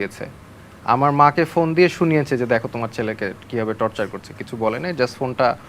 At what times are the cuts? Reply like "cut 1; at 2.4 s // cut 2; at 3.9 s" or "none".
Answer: none

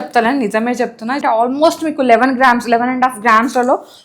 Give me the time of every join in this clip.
cut 1; at 1.2 s

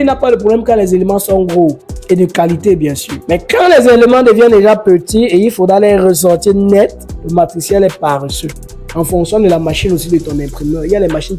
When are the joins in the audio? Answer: cut 1; at 1.9 s // cut 2; at 3.1 s

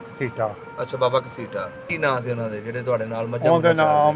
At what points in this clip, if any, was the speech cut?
cut 1; at 1.9 s

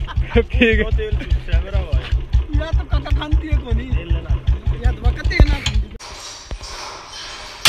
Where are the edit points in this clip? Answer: cut 1; at 5.9 s

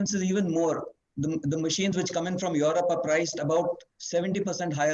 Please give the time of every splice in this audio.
none

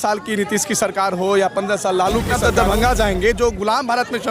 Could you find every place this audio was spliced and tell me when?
cut 1; at 2.3 s

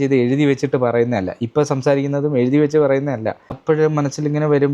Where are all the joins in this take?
cut 1; at 3.6 s

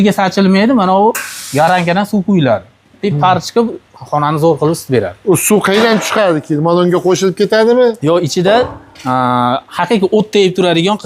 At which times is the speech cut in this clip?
none

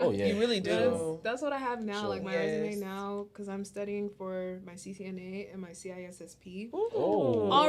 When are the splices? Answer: none

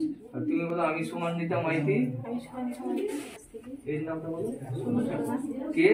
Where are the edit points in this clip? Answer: cut 1; at 3.3 s

